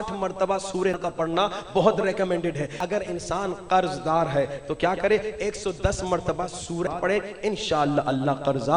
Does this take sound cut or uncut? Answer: cut